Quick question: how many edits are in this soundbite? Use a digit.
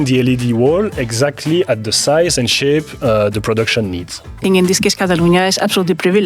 1